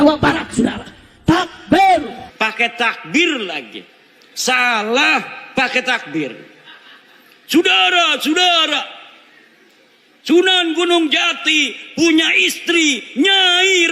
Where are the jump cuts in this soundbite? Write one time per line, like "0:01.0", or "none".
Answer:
0:02.2